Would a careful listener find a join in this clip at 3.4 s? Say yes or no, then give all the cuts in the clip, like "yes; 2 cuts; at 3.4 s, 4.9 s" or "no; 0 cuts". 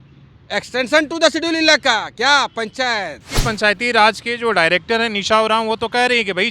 yes; 1 cut; at 3.4 s